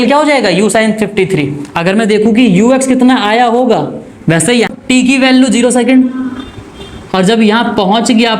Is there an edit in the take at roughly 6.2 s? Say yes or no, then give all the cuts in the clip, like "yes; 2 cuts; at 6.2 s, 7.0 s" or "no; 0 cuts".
no; 1 cut; at 4.7 s